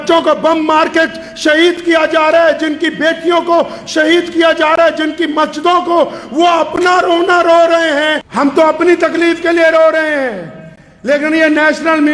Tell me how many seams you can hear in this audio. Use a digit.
1